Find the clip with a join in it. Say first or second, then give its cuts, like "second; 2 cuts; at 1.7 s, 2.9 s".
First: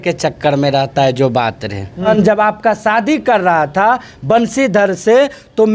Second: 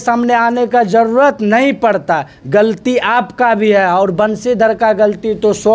first; 1 cut; at 2.1 s